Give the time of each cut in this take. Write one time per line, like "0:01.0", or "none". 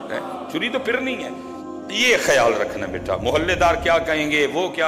0:01.8

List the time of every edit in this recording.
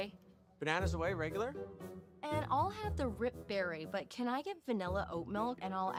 none

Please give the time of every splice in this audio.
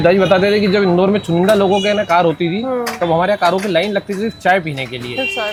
none

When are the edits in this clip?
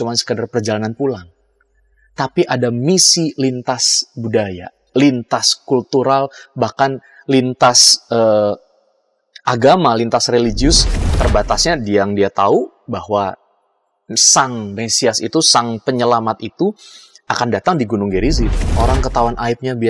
0:11.1
0:18.6

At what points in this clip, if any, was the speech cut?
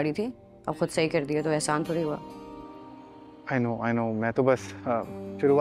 none

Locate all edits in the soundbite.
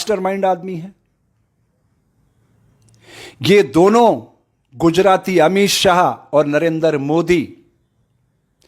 none

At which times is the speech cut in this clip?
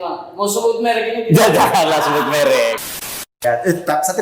0:03.0

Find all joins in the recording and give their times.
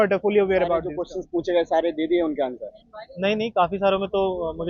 0:01.0

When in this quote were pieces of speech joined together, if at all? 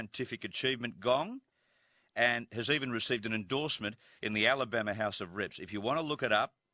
0:01.3

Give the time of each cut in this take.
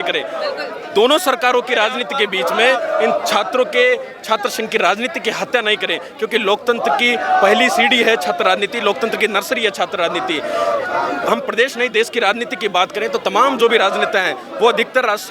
none

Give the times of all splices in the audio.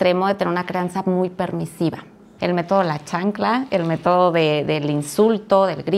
0:02.2

